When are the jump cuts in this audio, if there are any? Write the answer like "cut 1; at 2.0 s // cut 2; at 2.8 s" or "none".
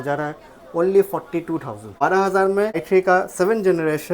cut 1; at 2.0 s // cut 2; at 2.8 s